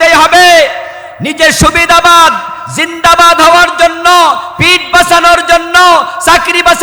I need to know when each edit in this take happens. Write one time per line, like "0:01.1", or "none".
none